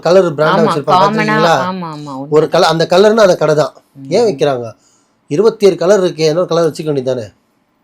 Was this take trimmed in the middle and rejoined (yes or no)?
no